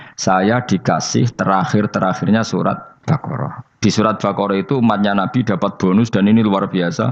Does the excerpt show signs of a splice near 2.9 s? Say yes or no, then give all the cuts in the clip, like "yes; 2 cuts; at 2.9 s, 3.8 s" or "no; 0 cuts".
yes; 1 cut; at 2.9 s